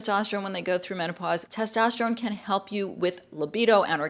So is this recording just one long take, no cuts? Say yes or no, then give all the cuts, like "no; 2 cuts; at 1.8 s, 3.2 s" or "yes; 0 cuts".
no; 1 cut; at 1.5 s